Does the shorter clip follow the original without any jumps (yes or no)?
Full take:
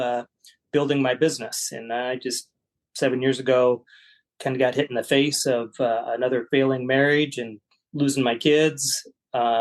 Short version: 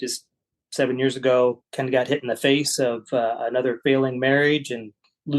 no